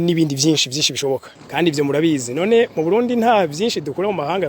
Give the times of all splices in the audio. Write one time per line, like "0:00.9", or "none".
0:01.4